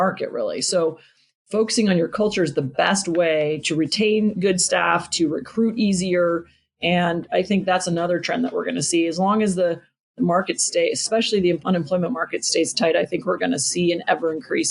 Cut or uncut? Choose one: cut